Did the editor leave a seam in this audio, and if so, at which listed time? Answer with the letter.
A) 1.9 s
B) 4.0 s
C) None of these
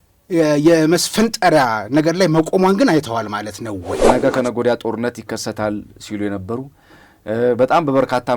B